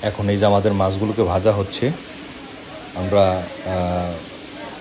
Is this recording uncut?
yes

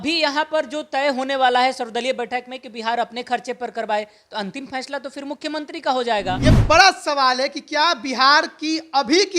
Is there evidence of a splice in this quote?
yes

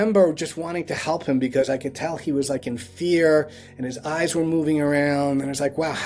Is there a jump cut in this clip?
no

